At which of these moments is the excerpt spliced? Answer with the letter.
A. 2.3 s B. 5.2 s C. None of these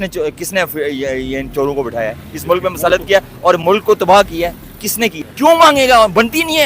B